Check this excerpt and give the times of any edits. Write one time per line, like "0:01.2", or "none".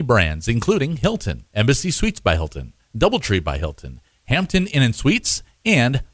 0:01.0